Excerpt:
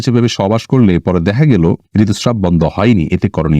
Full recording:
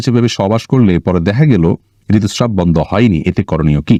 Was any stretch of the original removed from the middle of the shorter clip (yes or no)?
yes